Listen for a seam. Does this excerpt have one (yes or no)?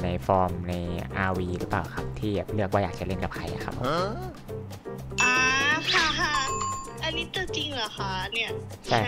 no